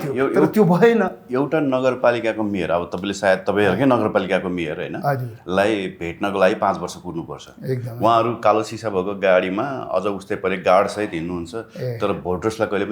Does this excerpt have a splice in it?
no; 0 cuts

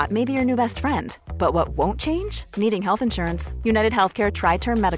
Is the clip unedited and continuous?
yes; 0 cuts

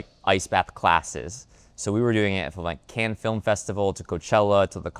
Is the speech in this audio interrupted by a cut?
no; 0 cuts

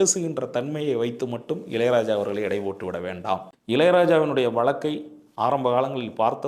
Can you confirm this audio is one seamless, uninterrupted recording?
no; 1 cut; at 3.5 s

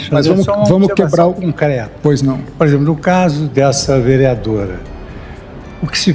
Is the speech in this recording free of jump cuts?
yes; 0 cuts

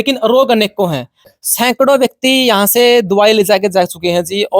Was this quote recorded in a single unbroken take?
no; 1 cut; at 1.2 s

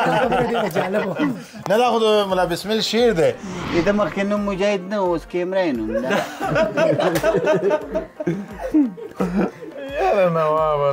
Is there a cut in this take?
yes; 1 cut; at 3.6 s

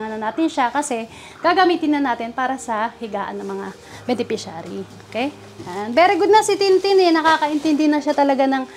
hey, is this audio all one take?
no; 1 cut; at 5.5 s

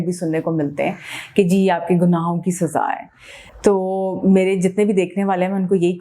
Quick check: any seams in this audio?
no; 0 cuts

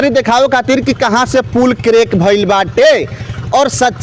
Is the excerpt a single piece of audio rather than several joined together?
yes; 0 cuts

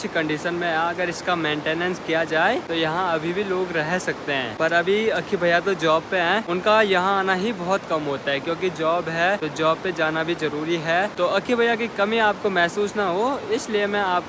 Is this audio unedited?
yes; 0 cuts

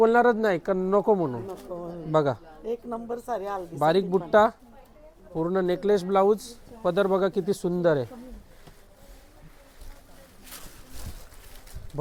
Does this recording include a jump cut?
no; 0 cuts

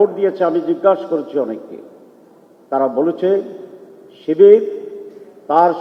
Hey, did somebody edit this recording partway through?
no; 0 cuts

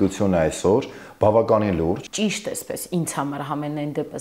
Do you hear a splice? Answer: yes; 1 cut; at 2.1 s

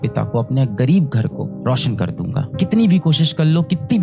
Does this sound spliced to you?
yes; 1 cut; at 2.4 s

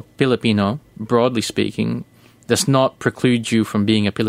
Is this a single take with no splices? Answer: yes; 0 cuts

